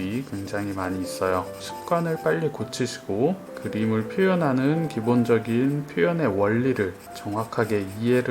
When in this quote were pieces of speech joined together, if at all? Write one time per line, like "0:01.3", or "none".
0:01.7